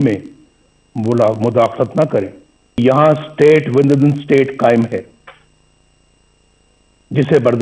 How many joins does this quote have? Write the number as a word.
one